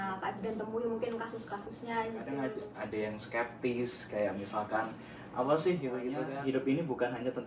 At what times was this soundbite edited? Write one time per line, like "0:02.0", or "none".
0:02.5
0:06.2